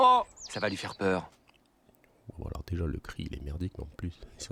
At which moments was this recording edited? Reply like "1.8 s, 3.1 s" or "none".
none